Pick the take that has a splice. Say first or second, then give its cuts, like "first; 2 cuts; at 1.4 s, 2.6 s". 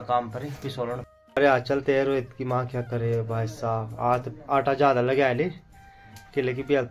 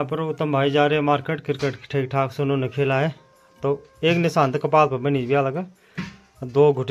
first; 1 cut; at 1.1 s